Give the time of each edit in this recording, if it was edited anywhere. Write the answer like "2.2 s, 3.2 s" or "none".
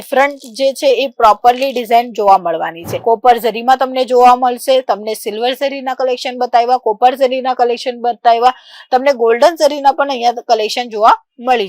2.9 s